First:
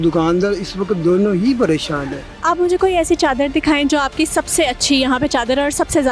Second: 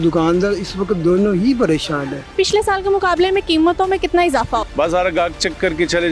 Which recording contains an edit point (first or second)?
second